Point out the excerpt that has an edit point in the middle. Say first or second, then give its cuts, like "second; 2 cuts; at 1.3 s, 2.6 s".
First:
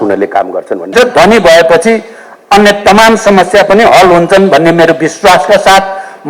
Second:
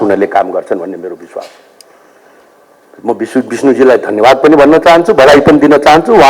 first; 1 cut; at 0.9 s